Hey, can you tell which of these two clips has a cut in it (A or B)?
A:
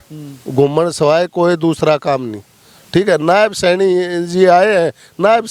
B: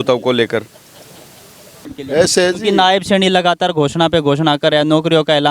B